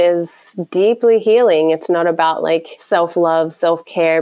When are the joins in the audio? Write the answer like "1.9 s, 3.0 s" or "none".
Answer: 2.7 s